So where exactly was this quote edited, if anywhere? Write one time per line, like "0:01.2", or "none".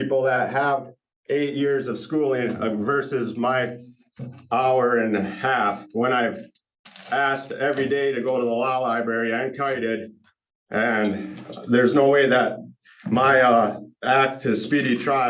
none

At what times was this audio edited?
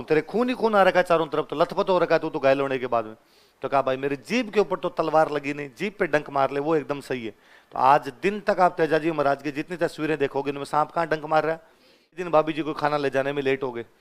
0:12.2

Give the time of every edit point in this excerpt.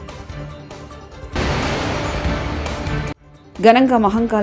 0:01.3
0:03.3

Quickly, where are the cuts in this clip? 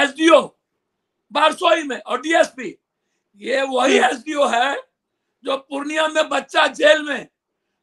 none

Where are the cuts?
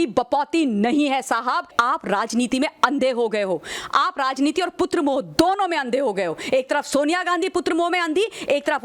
0:01.7

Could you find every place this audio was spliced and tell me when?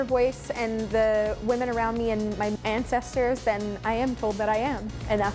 0:01.4
0:02.5

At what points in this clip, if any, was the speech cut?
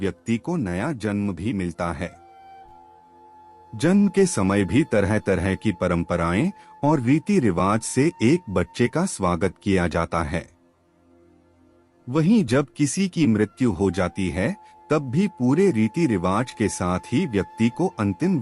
0:02.1
0:03.5

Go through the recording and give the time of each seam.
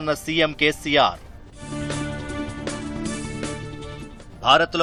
none

